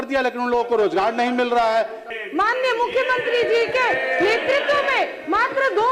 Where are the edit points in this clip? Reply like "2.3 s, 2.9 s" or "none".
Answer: 2.0 s